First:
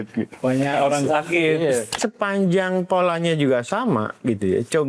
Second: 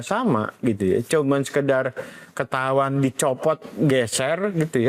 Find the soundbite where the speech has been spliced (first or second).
first